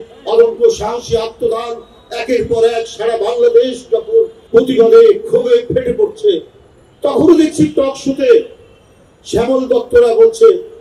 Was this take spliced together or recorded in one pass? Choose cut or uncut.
cut